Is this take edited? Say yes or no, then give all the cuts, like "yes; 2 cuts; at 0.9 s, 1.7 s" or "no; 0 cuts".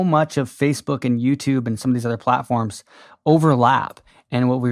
no; 0 cuts